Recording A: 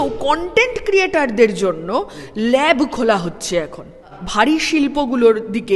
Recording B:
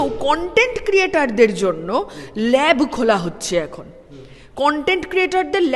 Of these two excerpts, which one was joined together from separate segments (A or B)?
A